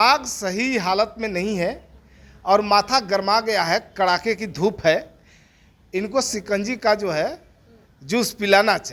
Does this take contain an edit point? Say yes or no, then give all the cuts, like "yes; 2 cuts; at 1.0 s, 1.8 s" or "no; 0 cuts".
no; 0 cuts